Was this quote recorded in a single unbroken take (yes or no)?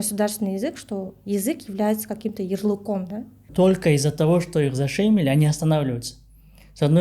no